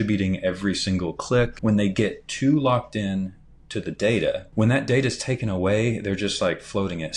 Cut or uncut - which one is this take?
cut